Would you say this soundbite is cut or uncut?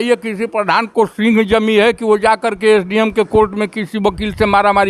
uncut